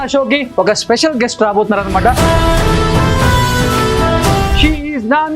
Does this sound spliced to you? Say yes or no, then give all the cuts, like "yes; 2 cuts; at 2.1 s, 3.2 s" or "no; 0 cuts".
yes; 2 cuts; at 2.2 s, 4.5 s